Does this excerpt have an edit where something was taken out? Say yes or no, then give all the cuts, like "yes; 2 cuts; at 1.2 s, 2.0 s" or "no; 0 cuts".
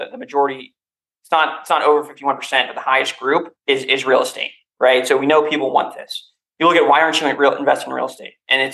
no; 0 cuts